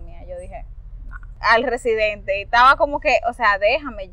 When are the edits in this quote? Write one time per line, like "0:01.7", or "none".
0:01.4